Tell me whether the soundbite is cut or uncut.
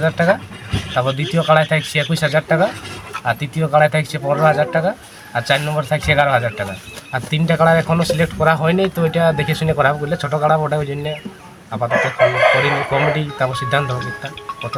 uncut